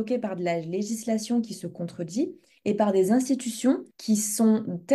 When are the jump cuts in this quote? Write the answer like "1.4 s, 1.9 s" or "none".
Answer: 3.9 s